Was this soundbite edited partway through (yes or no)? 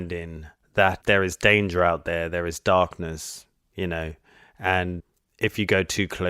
yes